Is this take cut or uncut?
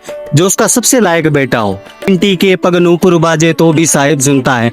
cut